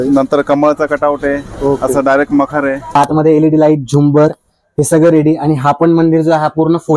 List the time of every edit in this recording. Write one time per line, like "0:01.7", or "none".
0:03.0